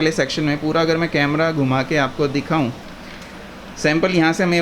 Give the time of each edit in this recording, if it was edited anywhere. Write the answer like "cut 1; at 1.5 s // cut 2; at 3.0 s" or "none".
cut 1; at 2.8 s